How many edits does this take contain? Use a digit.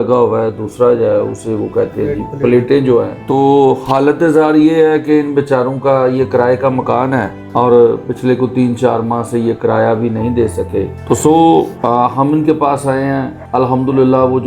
5